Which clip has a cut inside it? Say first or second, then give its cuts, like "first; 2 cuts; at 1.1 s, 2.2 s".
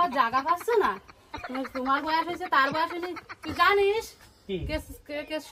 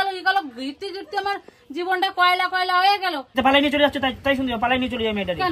second; 1 cut; at 3.3 s